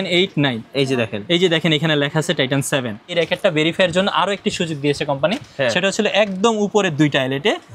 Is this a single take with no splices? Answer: no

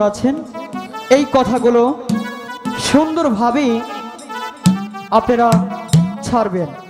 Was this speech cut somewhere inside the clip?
no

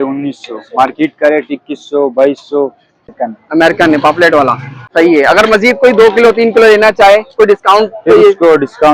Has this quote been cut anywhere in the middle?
yes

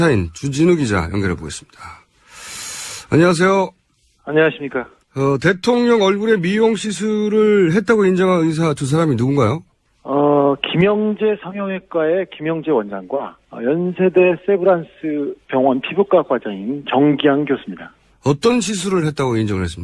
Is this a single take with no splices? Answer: yes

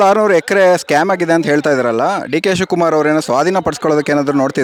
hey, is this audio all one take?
yes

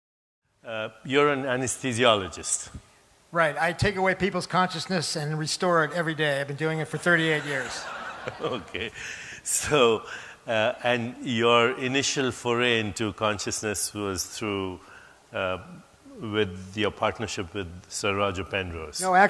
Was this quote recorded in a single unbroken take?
no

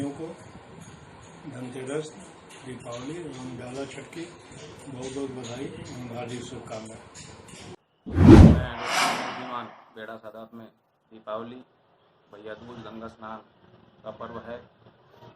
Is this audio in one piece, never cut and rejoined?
no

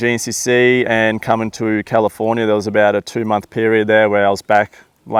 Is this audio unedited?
yes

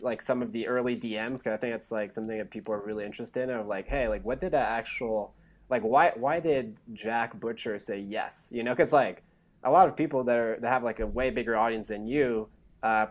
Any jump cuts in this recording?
no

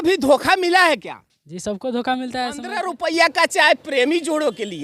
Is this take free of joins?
no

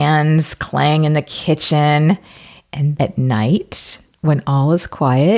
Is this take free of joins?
no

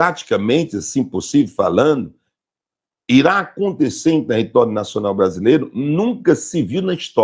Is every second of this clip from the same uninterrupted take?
yes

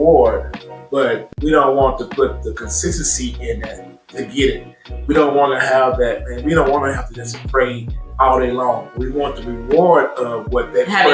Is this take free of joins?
yes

